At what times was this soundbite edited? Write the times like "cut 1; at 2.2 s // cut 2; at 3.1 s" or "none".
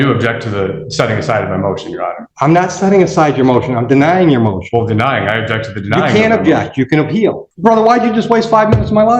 cut 1; at 2.2 s // cut 2; at 7.5 s